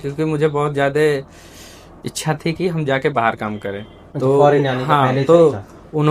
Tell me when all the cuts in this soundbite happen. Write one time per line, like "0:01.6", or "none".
none